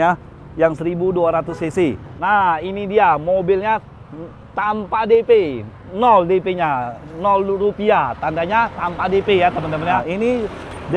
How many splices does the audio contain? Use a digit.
2